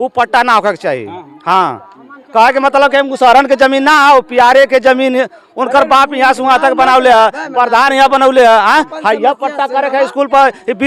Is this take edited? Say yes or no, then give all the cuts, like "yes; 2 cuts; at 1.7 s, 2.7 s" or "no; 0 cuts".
no; 0 cuts